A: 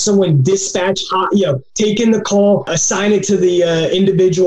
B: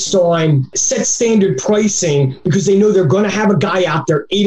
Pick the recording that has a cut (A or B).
A